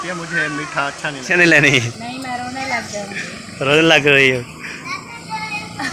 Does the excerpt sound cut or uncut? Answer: cut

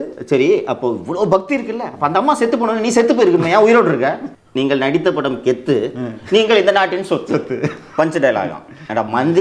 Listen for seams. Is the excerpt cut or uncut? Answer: cut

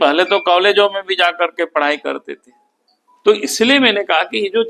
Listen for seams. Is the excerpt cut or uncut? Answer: uncut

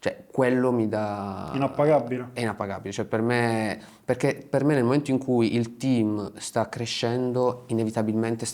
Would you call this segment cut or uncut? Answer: uncut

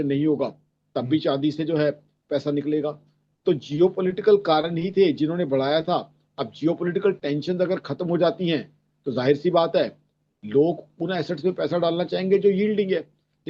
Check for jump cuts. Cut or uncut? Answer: uncut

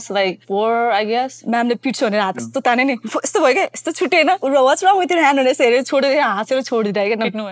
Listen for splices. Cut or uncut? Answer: uncut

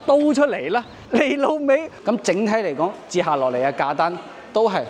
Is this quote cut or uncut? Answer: cut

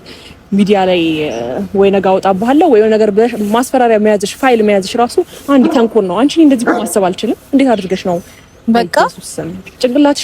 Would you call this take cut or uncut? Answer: uncut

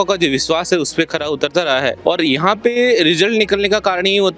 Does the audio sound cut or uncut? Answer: cut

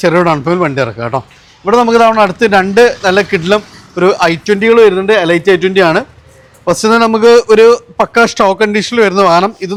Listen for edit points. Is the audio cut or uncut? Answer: uncut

